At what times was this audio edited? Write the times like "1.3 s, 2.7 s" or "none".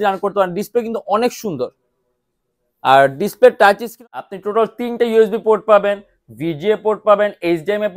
3.9 s